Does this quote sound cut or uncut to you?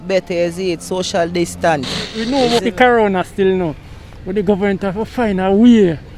cut